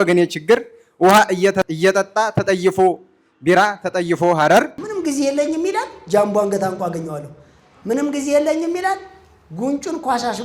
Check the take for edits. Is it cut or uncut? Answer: cut